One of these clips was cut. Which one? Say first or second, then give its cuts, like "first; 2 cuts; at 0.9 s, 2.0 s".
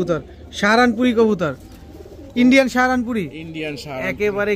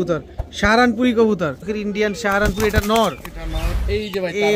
second; 1 cut; at 1.7 s